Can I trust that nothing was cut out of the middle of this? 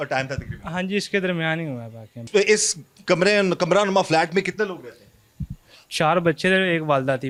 yes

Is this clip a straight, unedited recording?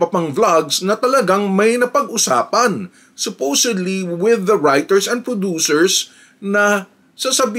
yes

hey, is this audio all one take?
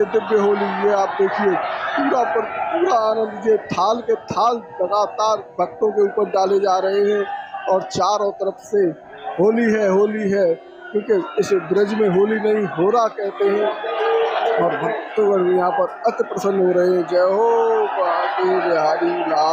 yes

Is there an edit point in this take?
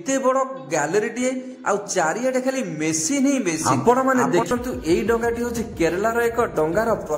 yes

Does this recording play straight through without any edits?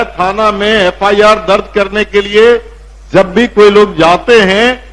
yes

